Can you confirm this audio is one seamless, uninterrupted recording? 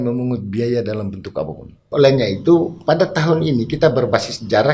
no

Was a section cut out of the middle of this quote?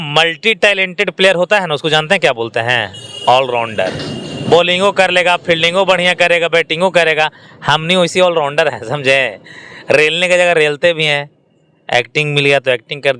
no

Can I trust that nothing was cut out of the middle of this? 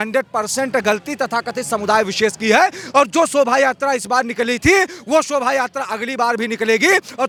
yes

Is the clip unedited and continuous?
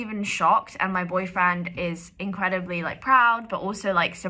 yes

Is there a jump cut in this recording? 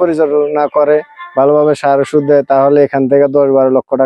no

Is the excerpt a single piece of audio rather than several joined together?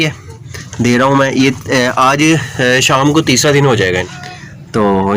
no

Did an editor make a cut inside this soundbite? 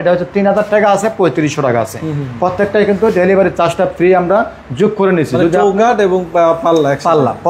no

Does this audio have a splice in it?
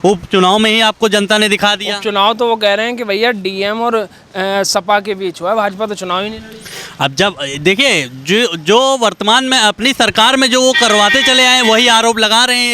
no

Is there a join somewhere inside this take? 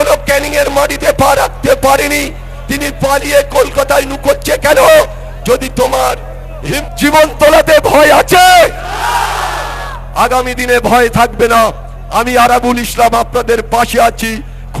yes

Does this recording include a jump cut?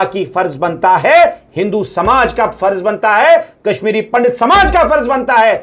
no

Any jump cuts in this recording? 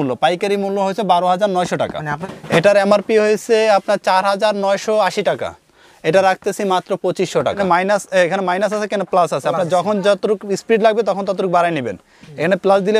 yes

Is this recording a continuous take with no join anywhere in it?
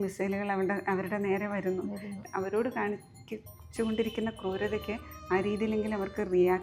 no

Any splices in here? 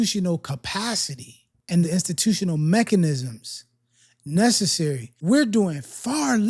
yes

